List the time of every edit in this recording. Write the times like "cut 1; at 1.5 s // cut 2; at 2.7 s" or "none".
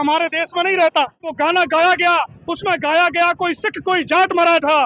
cut 1; at 1.3 s